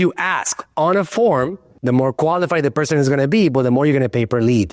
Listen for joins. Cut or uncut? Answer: uncut